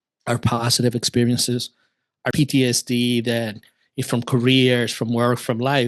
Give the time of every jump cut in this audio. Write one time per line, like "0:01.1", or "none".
0:02.3

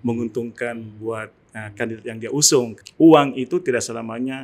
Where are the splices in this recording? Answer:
0:02.8

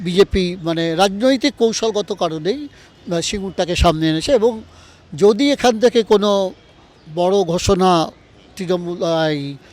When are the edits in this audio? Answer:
none

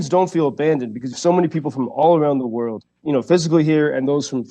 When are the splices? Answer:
0:01.1
0:03.0

